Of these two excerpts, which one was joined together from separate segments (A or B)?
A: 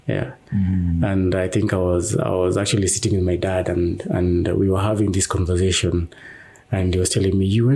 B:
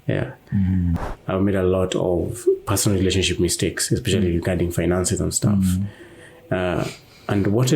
B